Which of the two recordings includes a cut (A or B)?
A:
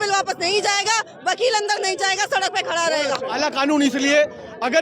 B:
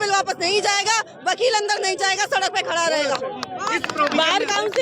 A